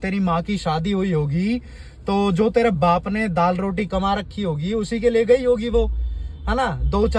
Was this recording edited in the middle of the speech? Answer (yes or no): no